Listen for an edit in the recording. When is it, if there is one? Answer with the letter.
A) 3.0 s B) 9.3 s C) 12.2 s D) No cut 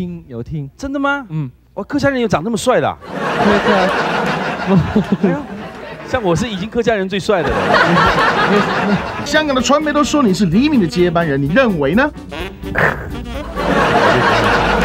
B